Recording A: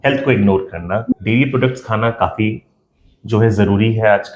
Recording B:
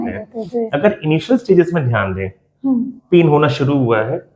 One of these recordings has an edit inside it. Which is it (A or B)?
A